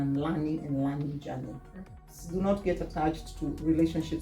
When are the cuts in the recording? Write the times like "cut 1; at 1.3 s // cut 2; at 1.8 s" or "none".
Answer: cut 1; at 2.2 s